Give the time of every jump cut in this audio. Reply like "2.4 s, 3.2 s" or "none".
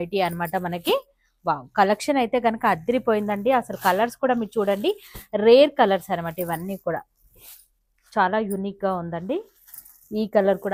none